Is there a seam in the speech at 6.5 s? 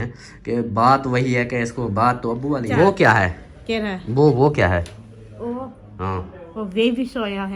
no; 1 cut; at 2.7 s

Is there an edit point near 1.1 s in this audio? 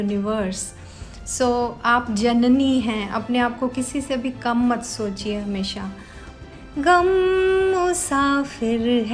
no; 1 cut; at 6.3 s

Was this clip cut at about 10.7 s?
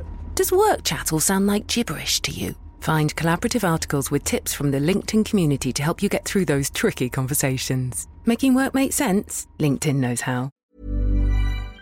yes; 1 cut; at 10.7 s

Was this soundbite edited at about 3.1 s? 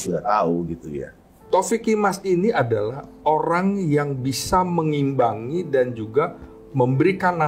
no; 1 cut; at 1.4 s

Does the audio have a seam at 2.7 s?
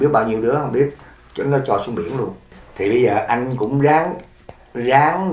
yes; 1 cut; at 2.7 s

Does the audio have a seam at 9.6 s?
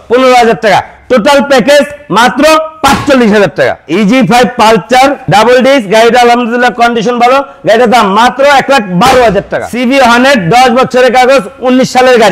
yes; 3 cuts; at 3.8 s, 5.2 s, 9.6 s

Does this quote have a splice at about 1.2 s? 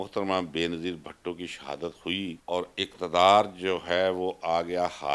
no; 1 cut; at 2.4 s

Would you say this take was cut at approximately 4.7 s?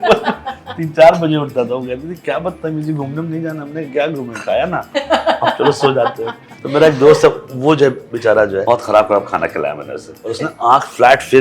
no; 3 cuts; at 6.5 s, 8.6 s, 10.2 s

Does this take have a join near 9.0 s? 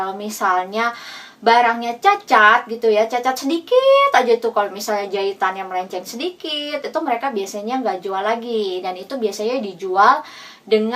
no; 0 cuts

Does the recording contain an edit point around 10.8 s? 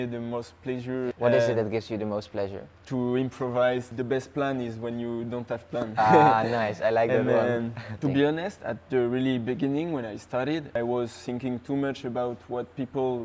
yes; 4 cuts; at 1.1 s, 3.9 s, 8.0 s, 10.8 s

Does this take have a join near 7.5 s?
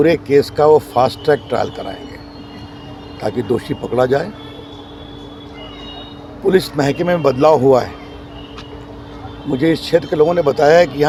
no; 0 cuts

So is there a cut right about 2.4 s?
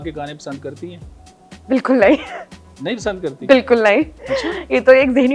no; 0 cuts

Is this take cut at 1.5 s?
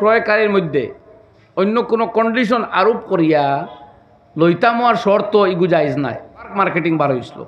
no; 1 cut; at 6.5 s

